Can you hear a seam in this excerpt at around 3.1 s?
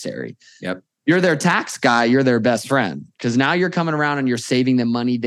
no; 0 cuts

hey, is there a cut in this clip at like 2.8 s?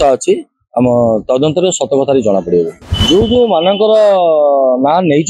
yes; 1 cut; at 2.8 s

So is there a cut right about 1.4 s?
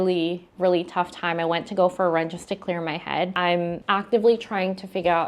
no; 1 cut; at 3.3 s

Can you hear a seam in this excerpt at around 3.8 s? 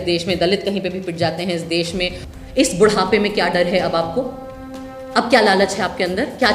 no; 1 cut; at 2.2 s

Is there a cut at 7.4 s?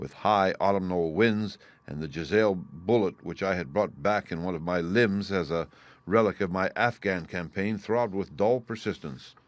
yes; 1 cut; at 7.4 s

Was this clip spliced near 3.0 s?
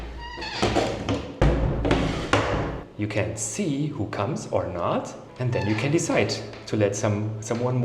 no; 1 cut; at 5.2 s

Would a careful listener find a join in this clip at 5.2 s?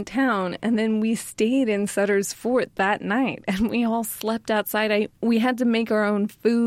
yes; 1 cut; at 5.2 s

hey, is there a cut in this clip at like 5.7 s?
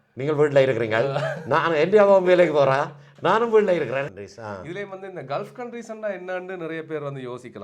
no; 1 cut; at 4.1 s

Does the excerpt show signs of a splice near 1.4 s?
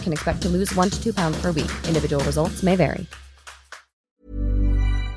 no; 1 cut; at 3.9 s

